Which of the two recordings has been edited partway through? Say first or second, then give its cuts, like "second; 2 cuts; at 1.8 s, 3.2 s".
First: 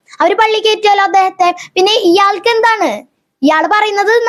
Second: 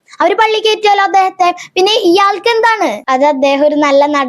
second; 1 cut; at 3.0 s